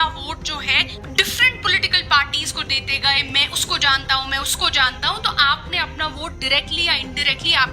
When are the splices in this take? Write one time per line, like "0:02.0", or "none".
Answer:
0:01.0

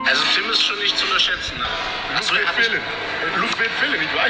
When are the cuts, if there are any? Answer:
none

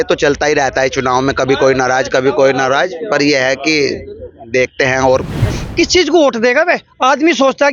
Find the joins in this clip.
0:05.5

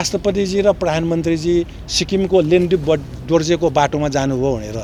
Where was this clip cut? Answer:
none

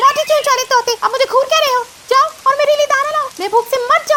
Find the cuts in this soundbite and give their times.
none

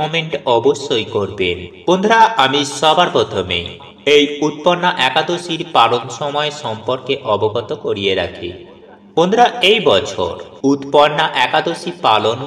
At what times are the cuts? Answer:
0:10.4

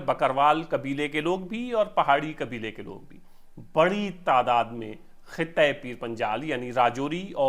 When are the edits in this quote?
none

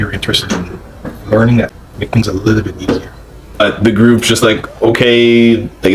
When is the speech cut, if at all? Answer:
0:01.7
0:03.6

